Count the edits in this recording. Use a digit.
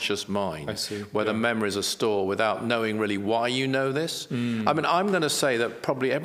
0